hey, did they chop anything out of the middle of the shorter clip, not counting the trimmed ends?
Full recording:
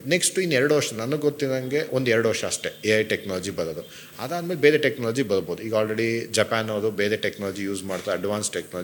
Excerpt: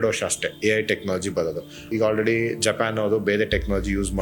yes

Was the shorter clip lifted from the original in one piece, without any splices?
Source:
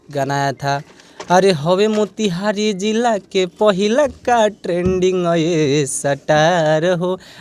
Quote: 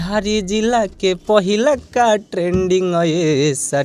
yes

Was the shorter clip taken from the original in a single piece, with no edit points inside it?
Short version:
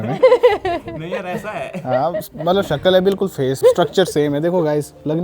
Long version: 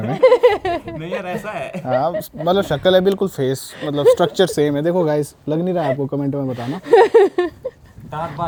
no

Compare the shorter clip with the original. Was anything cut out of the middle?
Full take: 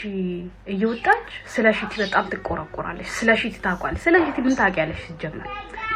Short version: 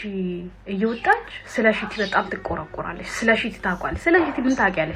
no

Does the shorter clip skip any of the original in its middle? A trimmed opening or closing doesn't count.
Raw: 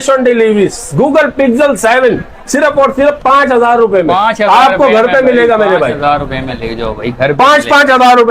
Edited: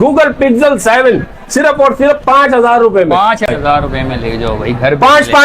yes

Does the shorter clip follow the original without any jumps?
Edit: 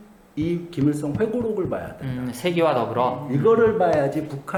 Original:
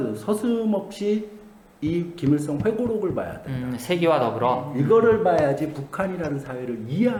yes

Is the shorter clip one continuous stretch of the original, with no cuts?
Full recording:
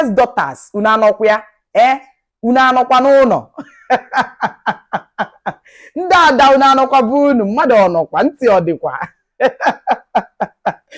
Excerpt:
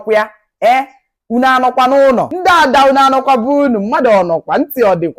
no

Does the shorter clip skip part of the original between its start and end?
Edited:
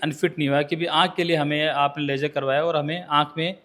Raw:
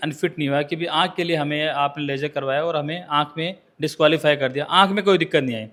no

